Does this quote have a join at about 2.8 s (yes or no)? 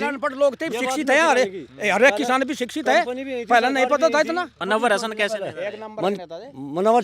no